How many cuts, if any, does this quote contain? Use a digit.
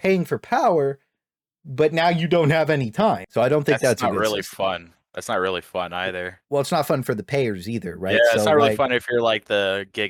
0